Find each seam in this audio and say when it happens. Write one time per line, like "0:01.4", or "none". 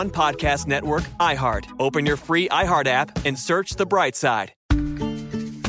0:04.5